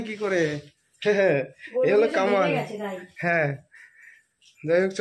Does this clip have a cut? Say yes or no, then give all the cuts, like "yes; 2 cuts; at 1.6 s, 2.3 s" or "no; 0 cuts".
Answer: no; 0 cuts